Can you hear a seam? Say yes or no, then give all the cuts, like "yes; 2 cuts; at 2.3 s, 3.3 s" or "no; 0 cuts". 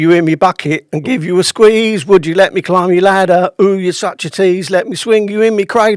no; 0 cuts